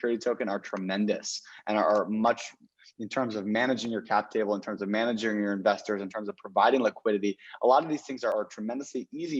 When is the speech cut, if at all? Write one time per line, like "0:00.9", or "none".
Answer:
none